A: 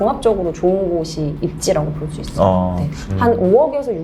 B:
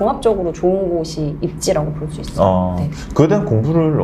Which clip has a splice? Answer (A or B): A